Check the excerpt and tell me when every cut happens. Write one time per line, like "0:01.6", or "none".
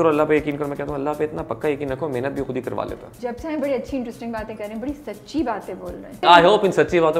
0:03.1
0:06.2